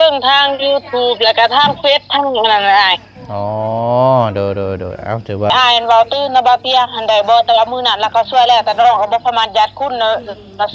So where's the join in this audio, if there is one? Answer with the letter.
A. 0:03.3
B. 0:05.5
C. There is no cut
B